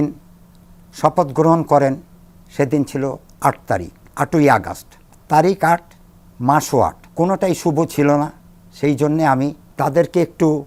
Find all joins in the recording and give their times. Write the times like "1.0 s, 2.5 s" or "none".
none